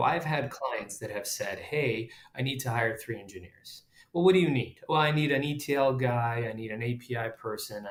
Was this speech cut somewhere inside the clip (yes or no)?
no